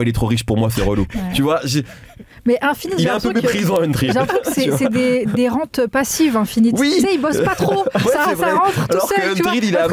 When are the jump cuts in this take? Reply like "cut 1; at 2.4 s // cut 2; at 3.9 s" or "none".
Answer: none